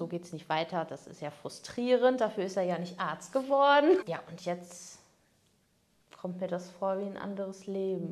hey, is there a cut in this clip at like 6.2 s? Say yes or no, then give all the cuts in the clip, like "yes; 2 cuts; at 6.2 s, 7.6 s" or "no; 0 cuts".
no; 1 cut; at 4.0 s